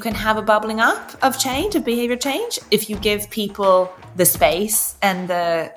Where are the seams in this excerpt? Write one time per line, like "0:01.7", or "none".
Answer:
0:01.1
0:04.0